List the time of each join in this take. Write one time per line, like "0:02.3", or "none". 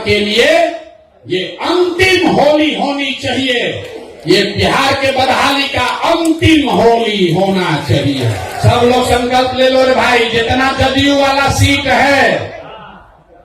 0:08.4